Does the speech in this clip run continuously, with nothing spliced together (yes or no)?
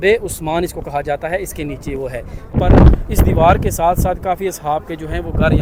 yes